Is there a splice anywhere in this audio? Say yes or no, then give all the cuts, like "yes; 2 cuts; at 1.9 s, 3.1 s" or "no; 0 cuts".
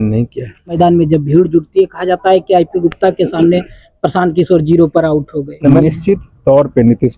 yes; 2 cuts; at 0.8 s, 5.7 s